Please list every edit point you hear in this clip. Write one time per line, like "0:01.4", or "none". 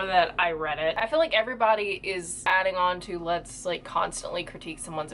0:01.0
0:02.5